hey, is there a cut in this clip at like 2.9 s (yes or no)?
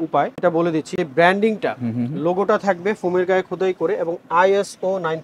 no